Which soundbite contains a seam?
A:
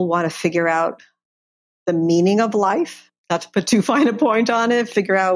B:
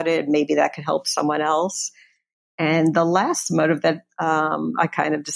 A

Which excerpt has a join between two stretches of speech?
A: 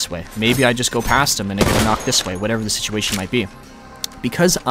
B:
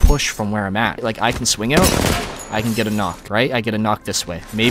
B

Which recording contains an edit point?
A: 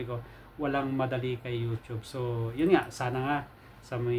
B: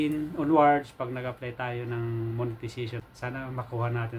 B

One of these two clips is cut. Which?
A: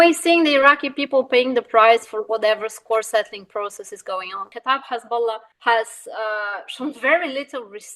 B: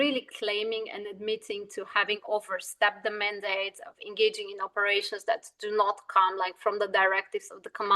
A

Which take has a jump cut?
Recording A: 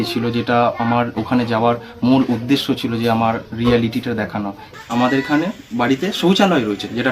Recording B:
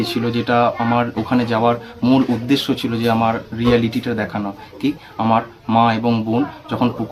A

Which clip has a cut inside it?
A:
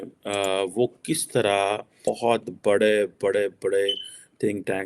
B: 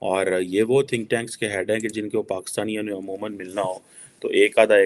A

